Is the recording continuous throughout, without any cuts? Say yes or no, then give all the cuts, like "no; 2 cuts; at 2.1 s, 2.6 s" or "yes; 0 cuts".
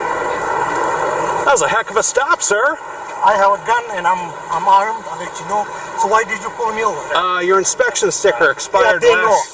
yes; 0 cuts